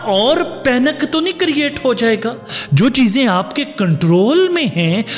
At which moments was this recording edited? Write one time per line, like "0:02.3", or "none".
0:02.6